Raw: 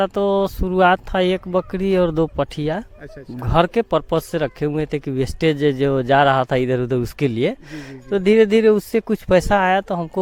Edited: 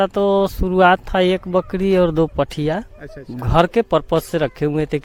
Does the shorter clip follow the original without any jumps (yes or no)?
yes